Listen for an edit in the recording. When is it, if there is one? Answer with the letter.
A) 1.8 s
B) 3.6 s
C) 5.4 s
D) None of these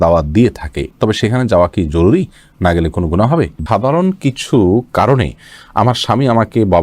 B